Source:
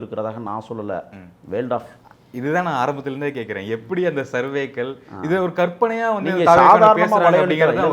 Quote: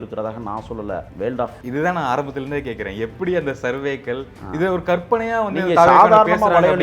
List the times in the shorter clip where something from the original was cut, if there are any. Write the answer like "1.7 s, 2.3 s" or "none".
1.3 s